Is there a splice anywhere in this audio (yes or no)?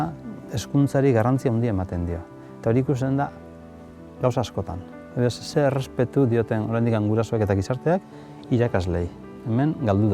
no